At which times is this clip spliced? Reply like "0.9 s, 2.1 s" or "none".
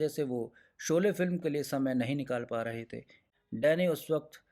3.3 s